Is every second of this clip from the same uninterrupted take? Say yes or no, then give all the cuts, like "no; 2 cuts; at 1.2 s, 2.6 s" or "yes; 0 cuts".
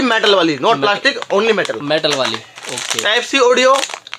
yes; 0 cuts